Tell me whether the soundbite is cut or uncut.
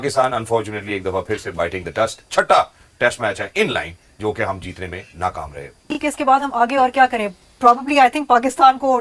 cut